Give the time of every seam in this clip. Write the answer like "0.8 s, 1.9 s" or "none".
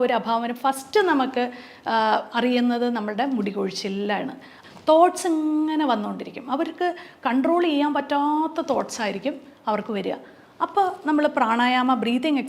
4.5 s

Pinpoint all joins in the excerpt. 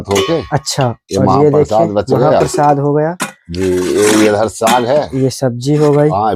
none

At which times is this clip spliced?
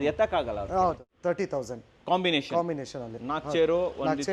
1.1 s

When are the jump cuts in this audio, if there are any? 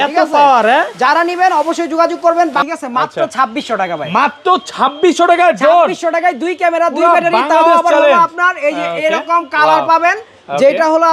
2.6 s

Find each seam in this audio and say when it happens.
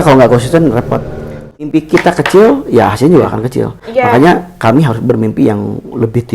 1.7 s

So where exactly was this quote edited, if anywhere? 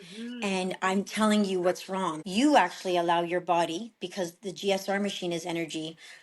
2.1 s

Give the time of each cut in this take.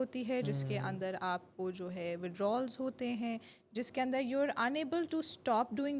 none

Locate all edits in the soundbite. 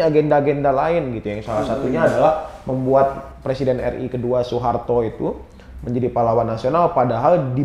none

